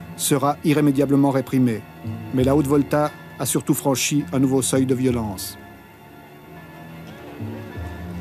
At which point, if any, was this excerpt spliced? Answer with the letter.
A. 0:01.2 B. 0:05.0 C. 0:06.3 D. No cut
D